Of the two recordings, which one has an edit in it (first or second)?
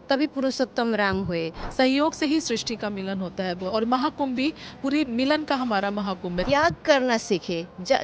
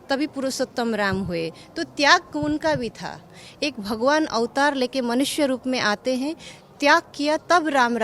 first